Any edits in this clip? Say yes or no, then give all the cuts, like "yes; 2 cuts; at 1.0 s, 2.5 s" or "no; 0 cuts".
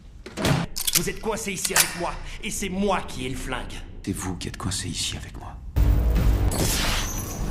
no; 0 cuts